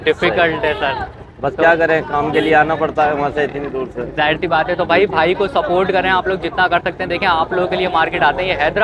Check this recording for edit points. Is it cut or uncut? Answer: uncut